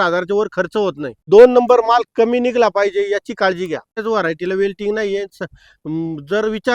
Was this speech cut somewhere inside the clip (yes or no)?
yes